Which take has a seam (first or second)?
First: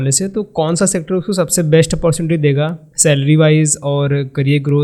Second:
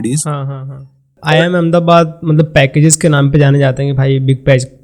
second